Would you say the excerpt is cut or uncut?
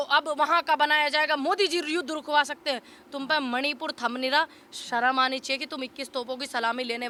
uncut